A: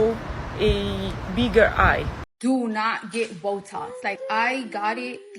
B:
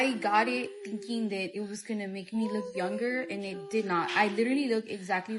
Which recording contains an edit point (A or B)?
A